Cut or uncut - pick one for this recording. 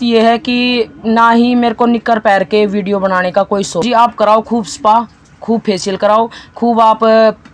cut